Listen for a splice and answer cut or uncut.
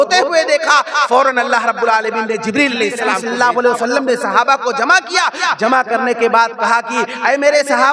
cut